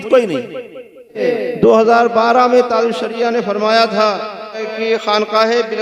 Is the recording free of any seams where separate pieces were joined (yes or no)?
no